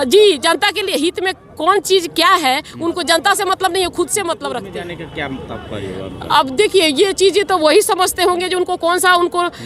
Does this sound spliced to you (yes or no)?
yes